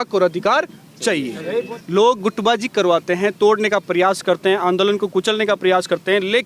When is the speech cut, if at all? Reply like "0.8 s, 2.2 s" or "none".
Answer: 1.8 s